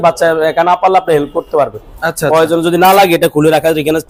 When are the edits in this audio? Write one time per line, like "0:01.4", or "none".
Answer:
none